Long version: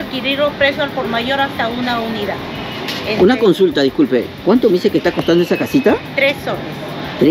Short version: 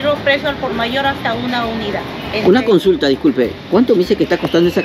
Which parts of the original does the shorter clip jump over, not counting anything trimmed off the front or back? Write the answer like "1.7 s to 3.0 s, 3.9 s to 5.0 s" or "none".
2.6 s to 3.0 s